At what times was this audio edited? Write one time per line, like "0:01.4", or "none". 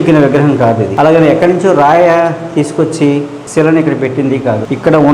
0:03.4

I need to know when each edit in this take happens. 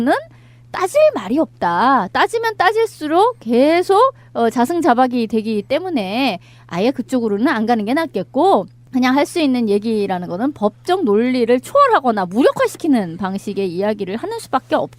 none

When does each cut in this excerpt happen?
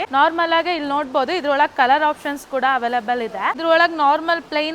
0:03.6

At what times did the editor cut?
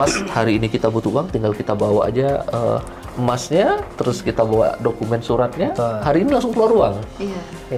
none

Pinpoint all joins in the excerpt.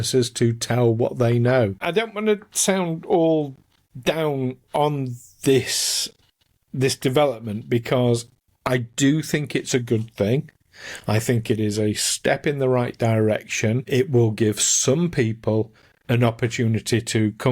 0:01.8
0:13.8

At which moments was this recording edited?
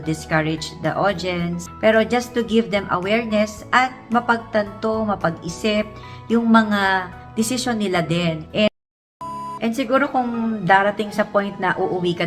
0:08.7

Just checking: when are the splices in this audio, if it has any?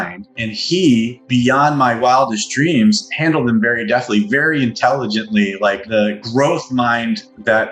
0:05.8

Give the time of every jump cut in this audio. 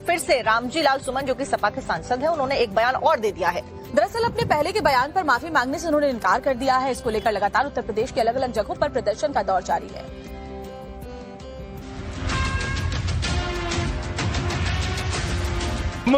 0:11.2

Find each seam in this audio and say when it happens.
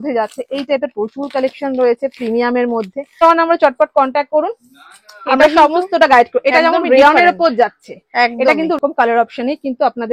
0:03.2
0:08.8

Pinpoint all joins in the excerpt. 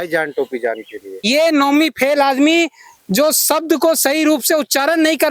0:01.2

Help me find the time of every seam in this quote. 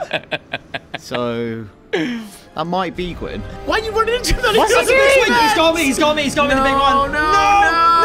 0:03.5

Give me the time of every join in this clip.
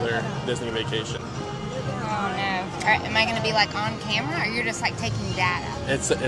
none

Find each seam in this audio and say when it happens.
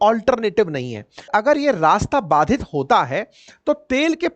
0:01.3

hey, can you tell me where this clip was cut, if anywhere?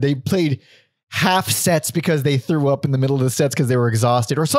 none

